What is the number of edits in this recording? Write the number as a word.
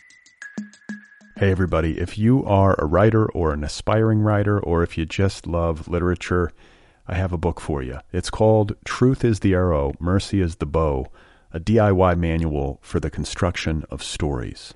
one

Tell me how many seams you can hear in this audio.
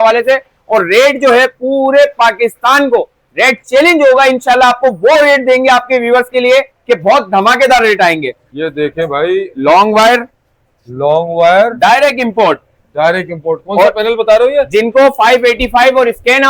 one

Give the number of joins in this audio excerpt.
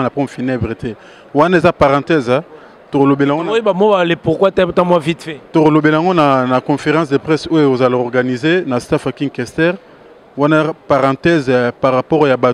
zero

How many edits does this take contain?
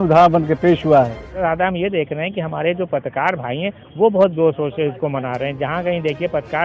one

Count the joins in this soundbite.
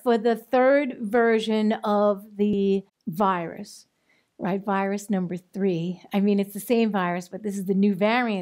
one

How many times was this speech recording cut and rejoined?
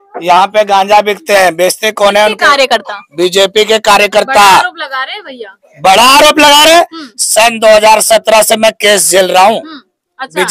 zero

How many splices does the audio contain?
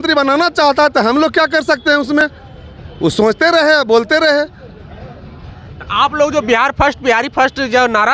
zero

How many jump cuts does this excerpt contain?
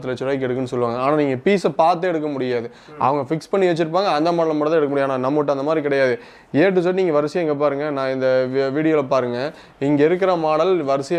zero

